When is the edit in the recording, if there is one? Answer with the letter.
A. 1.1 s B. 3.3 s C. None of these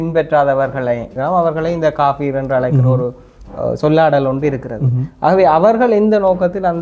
A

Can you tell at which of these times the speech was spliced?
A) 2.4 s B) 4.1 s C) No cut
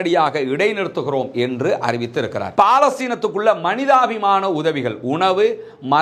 A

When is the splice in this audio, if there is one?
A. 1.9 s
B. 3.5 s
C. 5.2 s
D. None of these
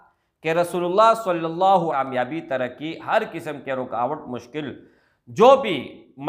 A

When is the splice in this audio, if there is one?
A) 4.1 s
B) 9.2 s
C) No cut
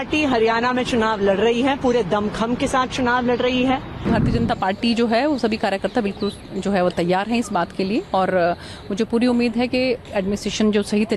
A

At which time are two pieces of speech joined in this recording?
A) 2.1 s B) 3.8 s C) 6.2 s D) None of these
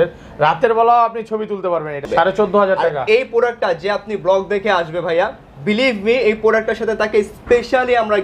A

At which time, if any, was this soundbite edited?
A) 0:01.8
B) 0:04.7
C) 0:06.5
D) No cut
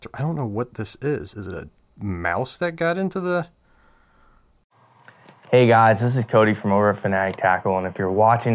B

